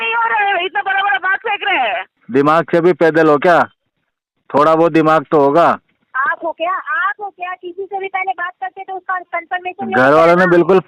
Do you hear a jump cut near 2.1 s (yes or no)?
yes